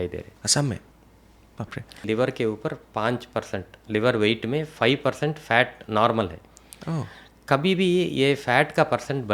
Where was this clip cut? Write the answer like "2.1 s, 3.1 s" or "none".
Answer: 2.0 s